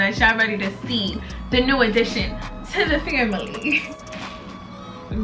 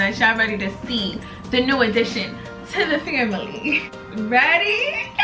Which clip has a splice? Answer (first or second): second